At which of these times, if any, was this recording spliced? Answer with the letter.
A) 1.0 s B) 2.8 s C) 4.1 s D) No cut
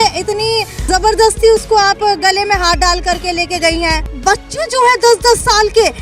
C